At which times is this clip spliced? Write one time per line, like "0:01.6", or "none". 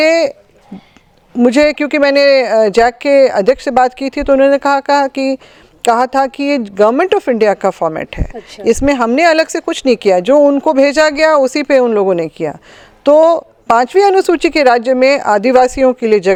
none